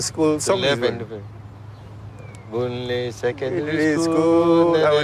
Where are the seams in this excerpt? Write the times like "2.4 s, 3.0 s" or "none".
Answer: none